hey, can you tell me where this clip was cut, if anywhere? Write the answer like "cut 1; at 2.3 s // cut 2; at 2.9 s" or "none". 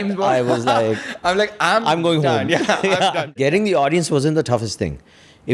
cut 1; at 3.3 s